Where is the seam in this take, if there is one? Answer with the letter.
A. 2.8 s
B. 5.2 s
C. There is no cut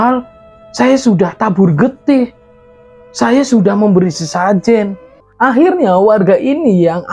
B